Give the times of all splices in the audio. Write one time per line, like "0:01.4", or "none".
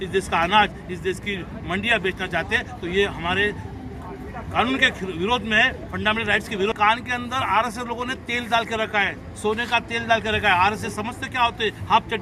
none